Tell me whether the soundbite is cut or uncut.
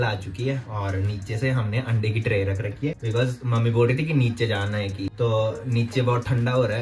uncut